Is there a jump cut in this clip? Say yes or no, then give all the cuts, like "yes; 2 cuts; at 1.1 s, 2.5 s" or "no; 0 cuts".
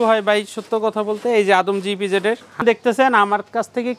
yes; 1 cut; at 2.6 s